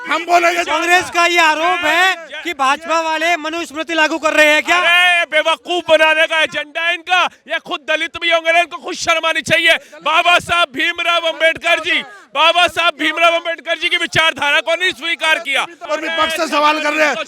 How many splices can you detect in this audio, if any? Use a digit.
1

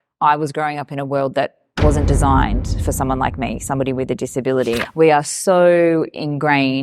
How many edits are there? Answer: 1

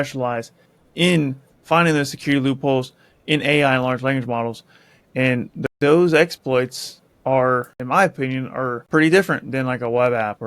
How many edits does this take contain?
3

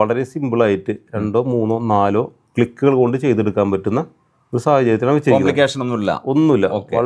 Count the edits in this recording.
0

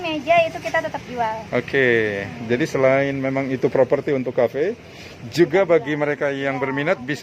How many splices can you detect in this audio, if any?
0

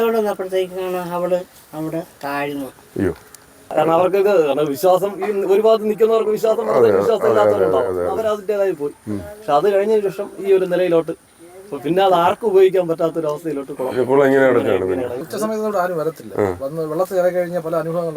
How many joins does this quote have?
2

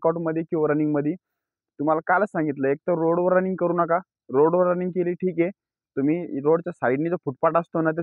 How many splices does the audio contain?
0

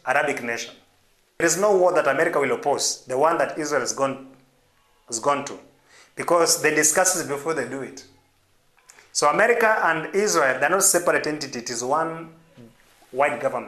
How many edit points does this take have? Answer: 1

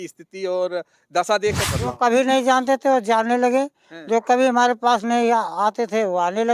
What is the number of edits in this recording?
1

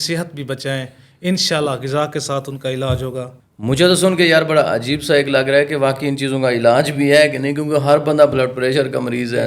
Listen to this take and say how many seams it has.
0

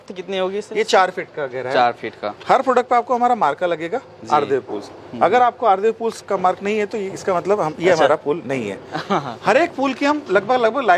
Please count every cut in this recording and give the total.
0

